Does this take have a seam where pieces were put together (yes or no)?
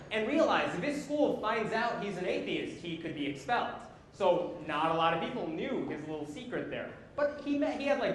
yes